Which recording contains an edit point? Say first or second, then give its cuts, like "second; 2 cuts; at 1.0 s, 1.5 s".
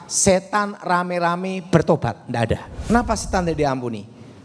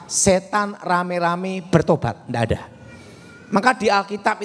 first; 1 cut; at 2.9 s